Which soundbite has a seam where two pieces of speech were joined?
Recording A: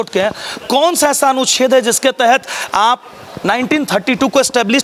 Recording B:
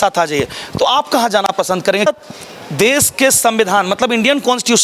B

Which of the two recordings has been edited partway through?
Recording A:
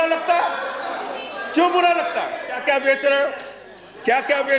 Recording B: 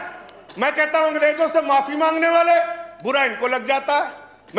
A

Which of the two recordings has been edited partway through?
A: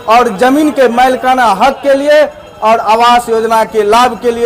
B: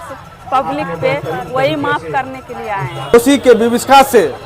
B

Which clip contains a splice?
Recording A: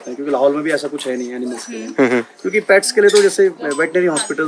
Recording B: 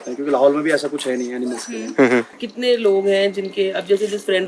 B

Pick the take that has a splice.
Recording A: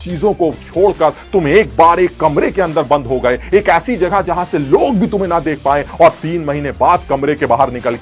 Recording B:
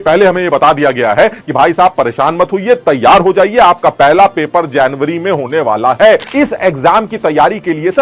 B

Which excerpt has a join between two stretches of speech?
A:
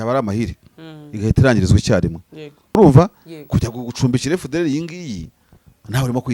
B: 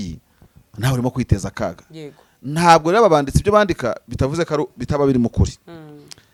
A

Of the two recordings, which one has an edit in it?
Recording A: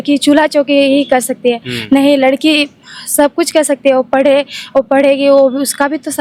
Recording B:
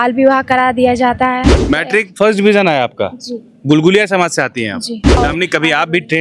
B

